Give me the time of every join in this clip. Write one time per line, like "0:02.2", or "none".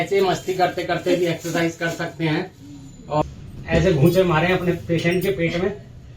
0:03.2